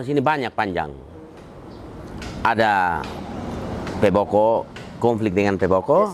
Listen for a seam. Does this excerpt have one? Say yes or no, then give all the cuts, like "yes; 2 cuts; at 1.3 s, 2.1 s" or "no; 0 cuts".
no; 0 cuts